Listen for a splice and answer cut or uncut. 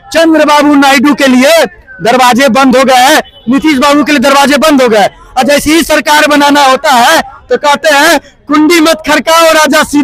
uncut